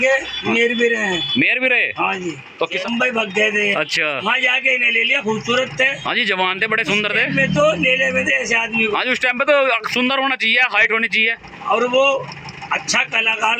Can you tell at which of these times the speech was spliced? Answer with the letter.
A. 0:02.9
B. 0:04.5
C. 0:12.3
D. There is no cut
A